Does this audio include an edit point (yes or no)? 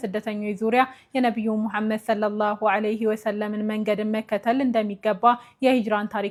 no